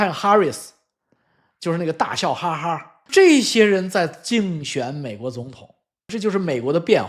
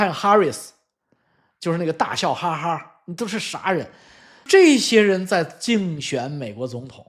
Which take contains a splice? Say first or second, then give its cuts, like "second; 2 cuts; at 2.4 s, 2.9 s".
first; 2 cuts; at 2.9 s, 6.1 s